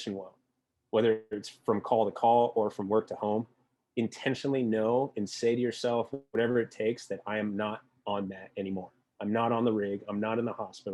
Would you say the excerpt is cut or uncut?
uncut